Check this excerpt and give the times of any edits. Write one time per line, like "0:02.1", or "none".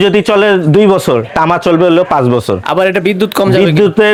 none